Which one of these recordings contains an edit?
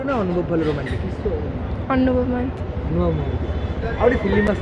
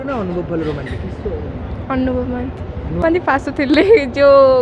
second; 1 cut; at 3.0 s

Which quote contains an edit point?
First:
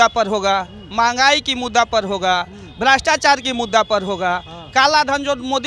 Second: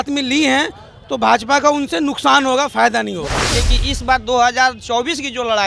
second; 1 cut; at 3.4 s

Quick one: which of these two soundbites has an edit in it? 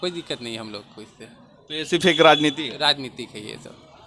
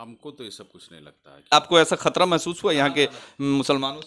second; 1 cut; at 1.7 s

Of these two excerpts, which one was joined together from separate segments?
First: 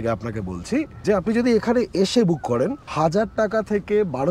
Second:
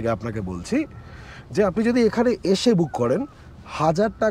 first; 2 cuts; at 0.9 s, 2.8 s

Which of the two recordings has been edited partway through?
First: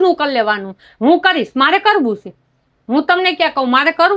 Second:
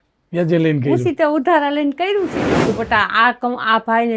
second; 1 cut; at 2.5 s

